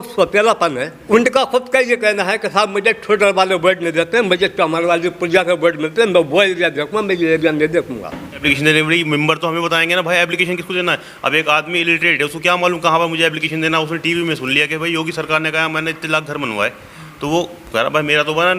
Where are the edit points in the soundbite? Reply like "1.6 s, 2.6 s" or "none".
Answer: 0.9 s, 8.4 s